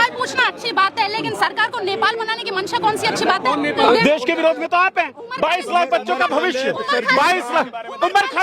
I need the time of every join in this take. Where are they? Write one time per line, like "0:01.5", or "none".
0:03.8